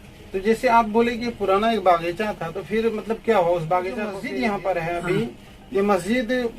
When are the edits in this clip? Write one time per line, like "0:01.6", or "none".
0:04.2